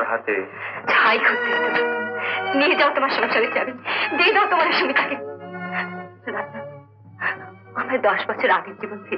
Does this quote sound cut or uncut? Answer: uncut